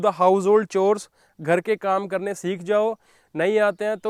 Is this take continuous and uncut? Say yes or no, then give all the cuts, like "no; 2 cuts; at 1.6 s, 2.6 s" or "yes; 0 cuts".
yes; 0 cuts